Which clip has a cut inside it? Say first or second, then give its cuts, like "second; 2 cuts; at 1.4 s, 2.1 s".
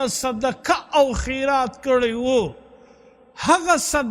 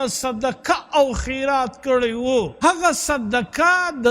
second; 1 cut; at 2.5 s